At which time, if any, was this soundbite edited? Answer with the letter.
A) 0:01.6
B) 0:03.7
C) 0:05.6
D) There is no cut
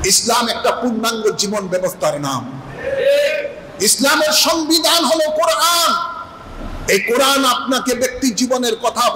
D